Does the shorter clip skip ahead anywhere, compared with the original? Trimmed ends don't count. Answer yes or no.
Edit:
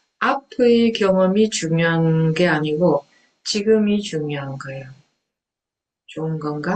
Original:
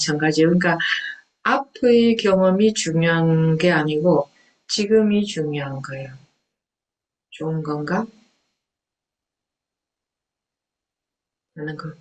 no